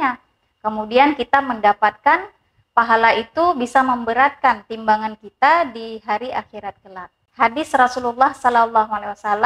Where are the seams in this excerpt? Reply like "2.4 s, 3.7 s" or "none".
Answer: 7.3 s